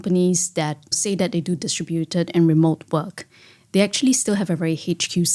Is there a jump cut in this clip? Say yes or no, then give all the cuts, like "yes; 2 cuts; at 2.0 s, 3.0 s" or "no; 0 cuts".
yes; 1 cut; at 1.0 s